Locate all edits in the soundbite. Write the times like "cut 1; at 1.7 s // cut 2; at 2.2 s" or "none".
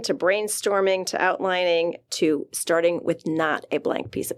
none

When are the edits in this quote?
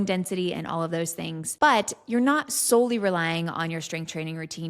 cut 1; at 1.4 s

